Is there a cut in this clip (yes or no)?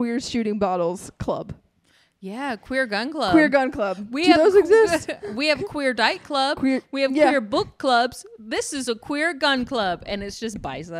no